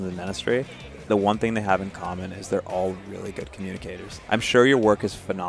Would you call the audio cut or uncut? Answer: cut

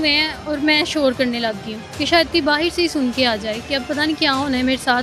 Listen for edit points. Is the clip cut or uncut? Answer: uncut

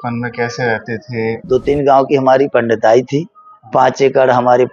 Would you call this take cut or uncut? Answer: cut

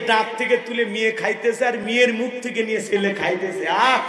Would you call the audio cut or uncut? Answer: uncut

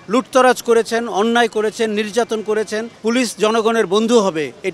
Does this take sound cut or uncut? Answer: cut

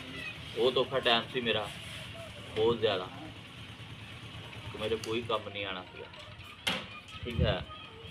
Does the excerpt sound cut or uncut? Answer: uncut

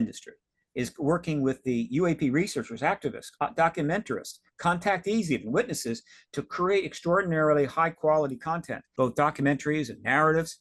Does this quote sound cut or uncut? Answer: cut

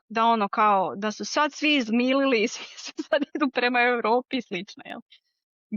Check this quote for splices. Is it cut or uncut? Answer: uncut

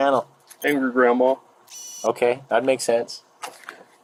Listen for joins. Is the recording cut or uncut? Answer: uncut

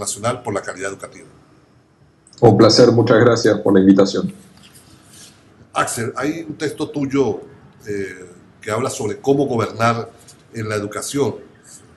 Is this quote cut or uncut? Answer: cut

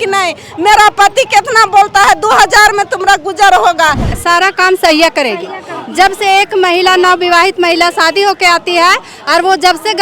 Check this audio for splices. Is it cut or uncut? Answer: cut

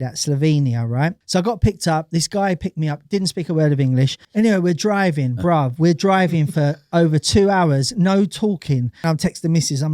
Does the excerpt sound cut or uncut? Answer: cut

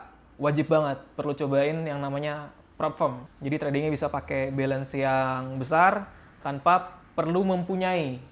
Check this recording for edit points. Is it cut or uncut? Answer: uncut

